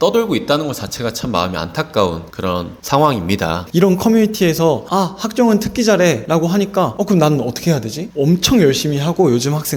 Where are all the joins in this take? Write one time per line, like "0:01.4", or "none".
0:02.4
0:03.6
0:06.5
0:08.0